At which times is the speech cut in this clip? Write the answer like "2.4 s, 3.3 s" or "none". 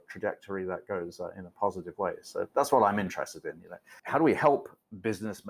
3.9 s